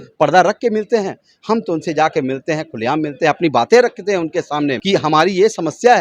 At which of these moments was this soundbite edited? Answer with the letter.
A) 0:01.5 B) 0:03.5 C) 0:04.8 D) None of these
C